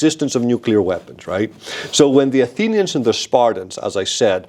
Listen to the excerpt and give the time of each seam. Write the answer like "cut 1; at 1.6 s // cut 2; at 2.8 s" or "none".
none